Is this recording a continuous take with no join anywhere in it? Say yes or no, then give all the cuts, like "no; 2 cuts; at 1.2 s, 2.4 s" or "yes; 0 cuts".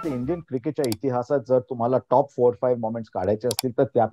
yes; 0 cuts